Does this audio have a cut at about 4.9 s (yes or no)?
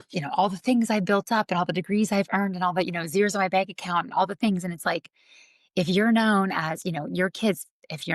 no